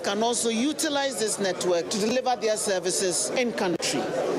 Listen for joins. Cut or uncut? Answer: cut